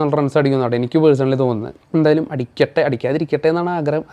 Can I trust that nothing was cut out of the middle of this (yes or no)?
no